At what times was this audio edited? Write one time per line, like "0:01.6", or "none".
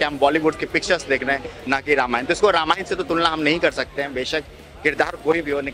none